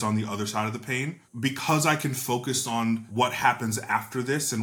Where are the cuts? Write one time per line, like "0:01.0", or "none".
0:01.2
0:03.1